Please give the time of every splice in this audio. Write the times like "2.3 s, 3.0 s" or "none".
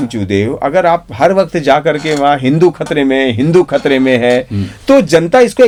none